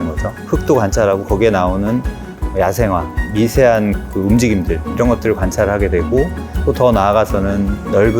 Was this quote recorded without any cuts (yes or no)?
yes